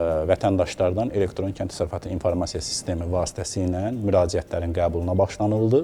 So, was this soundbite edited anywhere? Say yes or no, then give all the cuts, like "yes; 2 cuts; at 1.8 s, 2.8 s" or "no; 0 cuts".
no; 0 cuts